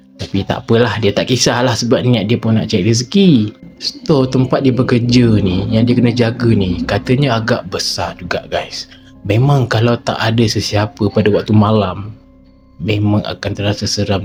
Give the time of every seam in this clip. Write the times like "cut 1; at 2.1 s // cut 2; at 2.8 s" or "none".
none